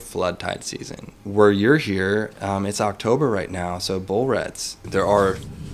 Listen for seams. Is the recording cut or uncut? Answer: cut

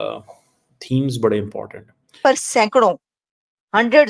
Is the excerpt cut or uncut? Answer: cut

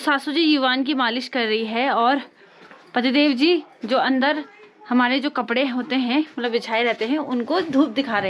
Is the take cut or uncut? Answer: uncut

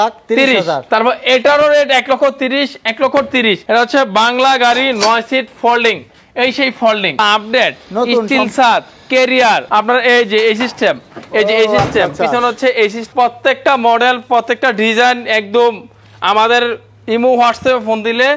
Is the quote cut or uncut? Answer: cut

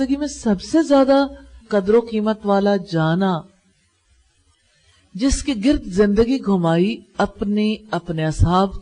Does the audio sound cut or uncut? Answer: cut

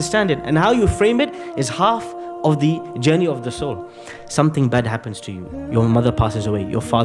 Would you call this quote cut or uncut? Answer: uncut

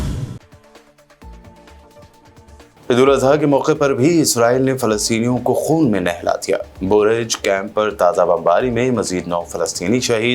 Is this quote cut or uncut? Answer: cut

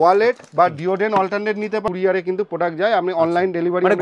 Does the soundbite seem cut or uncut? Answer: cut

